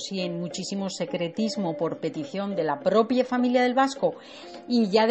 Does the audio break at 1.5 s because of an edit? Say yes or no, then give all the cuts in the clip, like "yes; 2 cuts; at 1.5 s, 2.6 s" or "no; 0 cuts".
yes; 1 cut; at 1.5 s